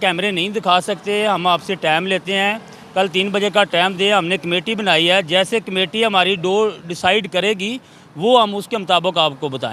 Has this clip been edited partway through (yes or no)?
no